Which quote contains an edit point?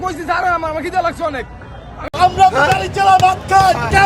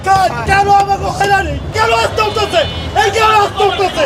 first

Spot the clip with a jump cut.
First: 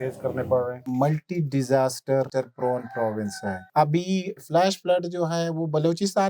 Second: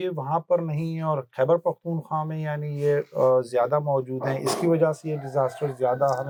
first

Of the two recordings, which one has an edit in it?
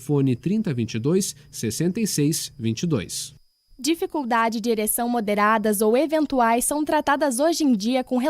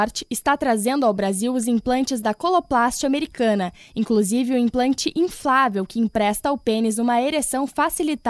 first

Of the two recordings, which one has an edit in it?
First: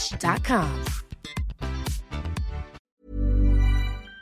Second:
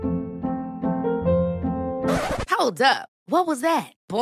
first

